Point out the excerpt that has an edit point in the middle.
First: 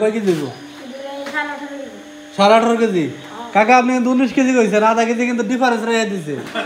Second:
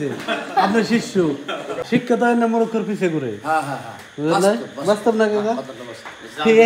second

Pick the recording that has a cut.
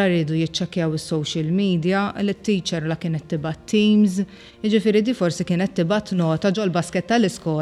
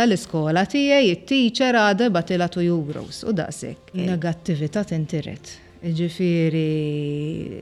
second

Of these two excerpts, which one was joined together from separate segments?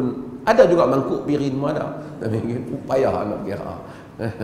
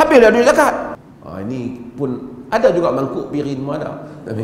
second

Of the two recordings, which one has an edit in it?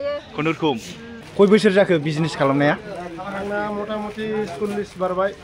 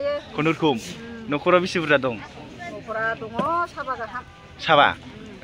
first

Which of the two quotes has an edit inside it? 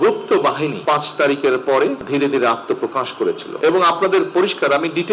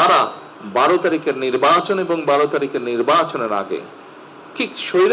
first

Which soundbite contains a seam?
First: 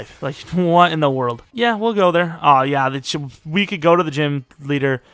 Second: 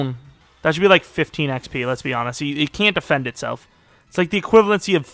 first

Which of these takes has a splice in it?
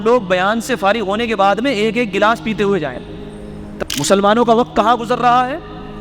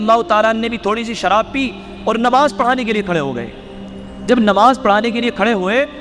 first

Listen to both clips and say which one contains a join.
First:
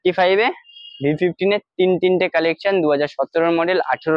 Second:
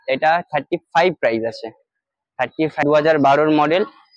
second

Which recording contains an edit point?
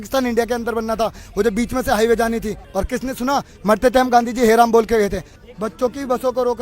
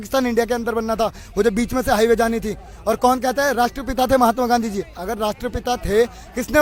first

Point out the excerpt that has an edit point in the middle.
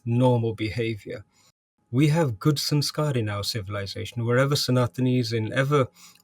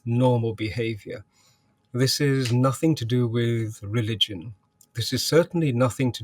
first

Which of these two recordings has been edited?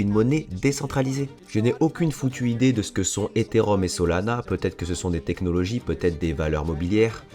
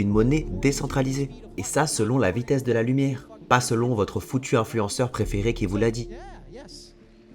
first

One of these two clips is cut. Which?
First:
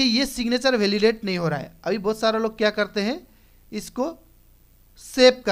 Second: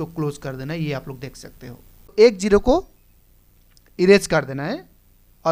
second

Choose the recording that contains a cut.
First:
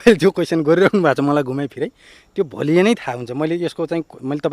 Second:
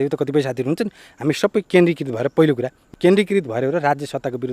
second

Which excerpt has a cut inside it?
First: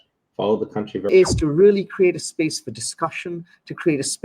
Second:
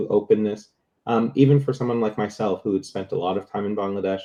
first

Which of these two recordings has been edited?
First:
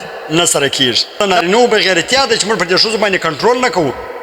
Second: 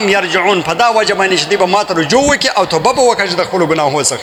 first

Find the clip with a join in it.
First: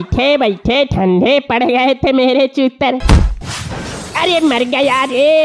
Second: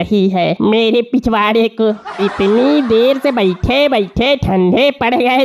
first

